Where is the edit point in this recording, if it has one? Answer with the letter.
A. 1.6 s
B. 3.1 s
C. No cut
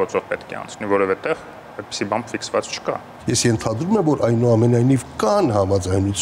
B